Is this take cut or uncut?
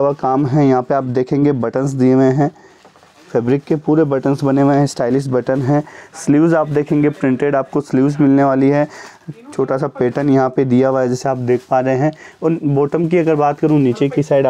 uncut